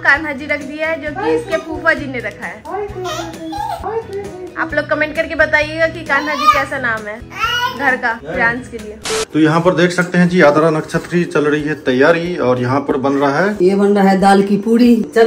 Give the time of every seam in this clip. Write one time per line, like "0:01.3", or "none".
none